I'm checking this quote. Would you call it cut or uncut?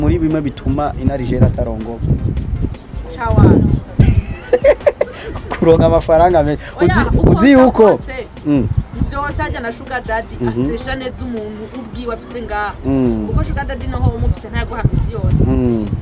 cut